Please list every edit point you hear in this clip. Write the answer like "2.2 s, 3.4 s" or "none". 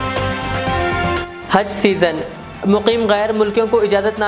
1.3 s